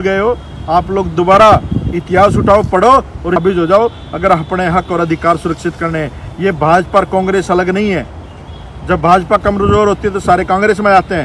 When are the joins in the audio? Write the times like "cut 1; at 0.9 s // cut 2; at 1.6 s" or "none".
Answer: none